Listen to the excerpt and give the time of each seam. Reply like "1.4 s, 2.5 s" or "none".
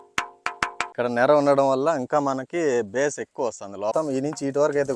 0.9 s, 3.9 s